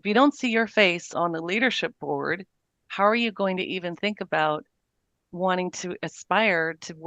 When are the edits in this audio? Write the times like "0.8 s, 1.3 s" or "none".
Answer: 1.1 s